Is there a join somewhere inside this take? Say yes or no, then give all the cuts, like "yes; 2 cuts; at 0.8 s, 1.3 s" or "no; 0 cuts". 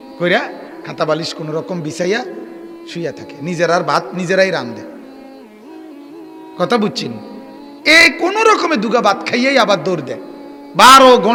no; 0 cuts